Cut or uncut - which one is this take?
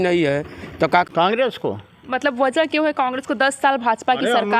cut